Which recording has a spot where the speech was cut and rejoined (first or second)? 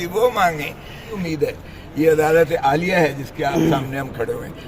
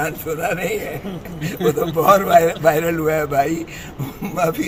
first